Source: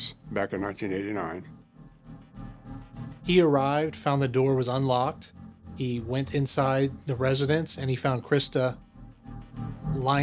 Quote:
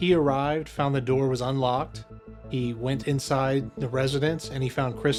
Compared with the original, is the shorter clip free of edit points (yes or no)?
yes